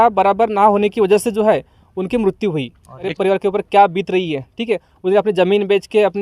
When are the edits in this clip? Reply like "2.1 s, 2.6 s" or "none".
3.1 s

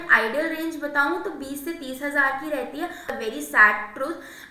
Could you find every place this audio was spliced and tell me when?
3.1 s

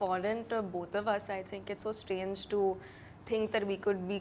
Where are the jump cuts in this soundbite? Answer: none

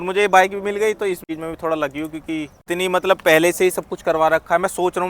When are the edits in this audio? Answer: 1.3 s, 2.6 s

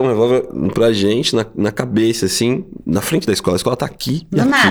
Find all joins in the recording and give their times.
none

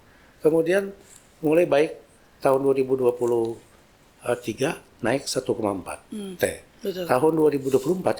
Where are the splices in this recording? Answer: none

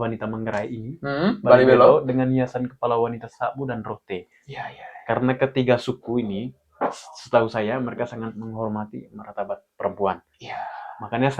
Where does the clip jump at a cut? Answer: none

